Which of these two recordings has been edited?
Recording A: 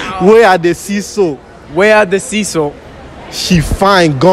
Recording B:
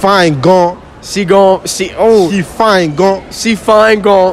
A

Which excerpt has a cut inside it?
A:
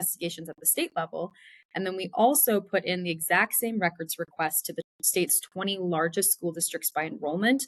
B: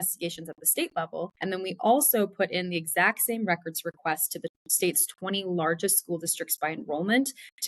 B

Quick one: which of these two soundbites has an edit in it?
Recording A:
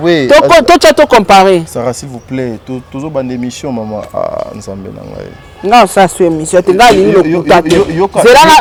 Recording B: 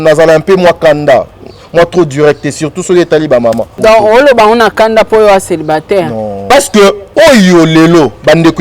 B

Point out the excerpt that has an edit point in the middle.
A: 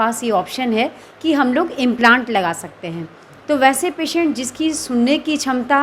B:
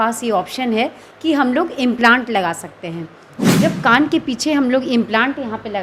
B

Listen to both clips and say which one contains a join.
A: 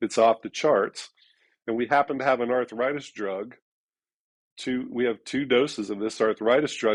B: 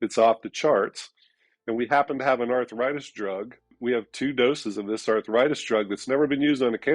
B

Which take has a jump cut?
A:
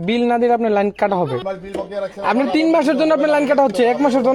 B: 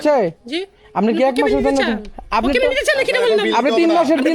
A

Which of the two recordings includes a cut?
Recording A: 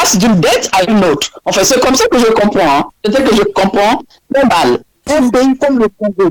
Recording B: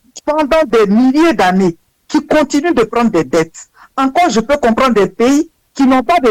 A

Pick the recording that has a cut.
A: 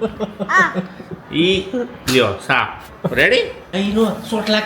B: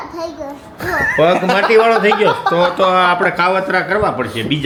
A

